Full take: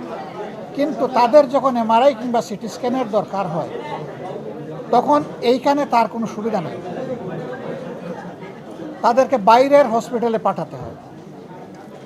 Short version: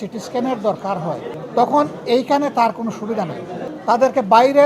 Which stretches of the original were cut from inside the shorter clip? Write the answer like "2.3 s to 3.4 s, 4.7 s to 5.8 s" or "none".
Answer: 3.8 s to 4.7 s, 7.0 s to 8.8 s